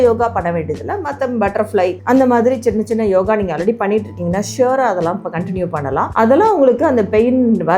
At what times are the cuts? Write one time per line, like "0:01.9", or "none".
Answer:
0:06.1